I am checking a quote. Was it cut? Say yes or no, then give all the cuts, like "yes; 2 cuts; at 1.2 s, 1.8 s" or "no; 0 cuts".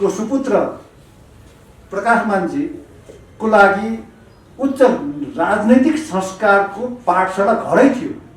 no; 0 cuts